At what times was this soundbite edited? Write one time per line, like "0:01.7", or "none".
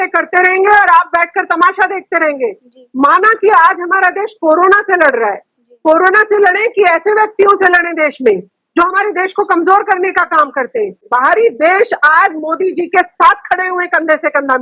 0:11.0